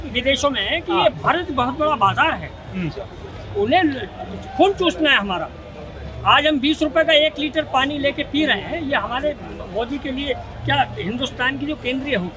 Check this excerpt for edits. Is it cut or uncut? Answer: uncut